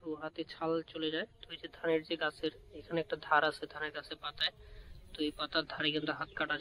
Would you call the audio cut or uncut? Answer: uncut